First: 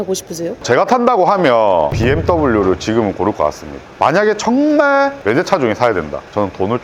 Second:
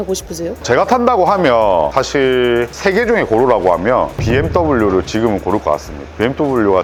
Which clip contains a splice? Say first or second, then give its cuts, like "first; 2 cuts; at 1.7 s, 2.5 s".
first; 2 cuts; at 1.9 s, 3.9 s